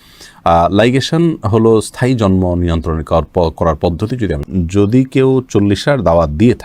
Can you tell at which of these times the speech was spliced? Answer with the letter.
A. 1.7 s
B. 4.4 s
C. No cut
B